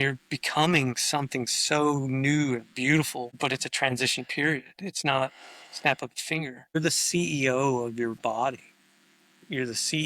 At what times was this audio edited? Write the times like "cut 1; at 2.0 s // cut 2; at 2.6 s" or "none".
cut 1; at 3.3 s // cut 2; at 6.8 s